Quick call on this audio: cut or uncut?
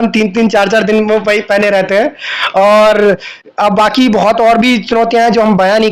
uncut